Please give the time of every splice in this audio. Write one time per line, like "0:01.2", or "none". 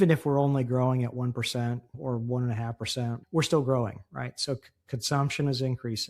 0:02.0
0:03.2